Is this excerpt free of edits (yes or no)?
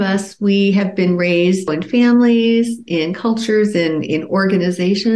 no